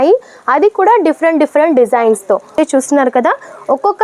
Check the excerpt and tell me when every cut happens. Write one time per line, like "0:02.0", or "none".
0:02.5